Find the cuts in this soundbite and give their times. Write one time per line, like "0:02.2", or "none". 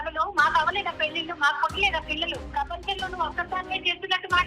0:02.5